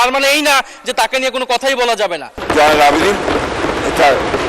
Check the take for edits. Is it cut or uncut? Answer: cut